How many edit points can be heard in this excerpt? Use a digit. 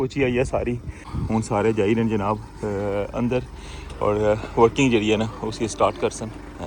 1